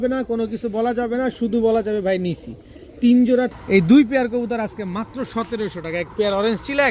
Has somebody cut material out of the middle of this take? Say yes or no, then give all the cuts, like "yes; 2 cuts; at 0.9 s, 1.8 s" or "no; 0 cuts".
yes; 1 cut; at 3.5 s